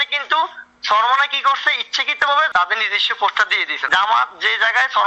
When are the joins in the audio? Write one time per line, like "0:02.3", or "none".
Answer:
0:02.5
0:03.7